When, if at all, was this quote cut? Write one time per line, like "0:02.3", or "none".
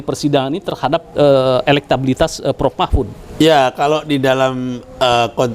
none